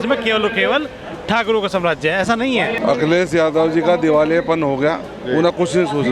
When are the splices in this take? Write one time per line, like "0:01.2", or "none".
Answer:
0:02.8